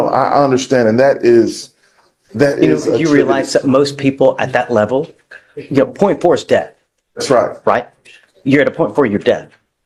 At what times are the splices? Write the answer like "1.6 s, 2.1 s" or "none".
none